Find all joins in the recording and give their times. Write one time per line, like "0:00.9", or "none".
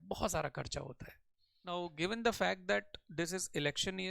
0:01.8